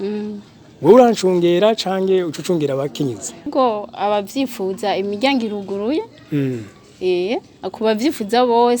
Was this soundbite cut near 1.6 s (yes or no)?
no